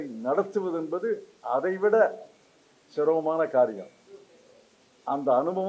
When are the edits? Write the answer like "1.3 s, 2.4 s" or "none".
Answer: none